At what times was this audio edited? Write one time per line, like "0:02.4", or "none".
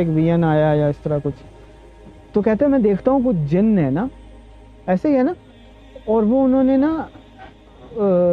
none